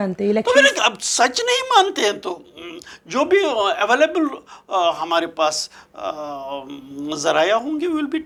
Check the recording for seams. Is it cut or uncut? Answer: uncut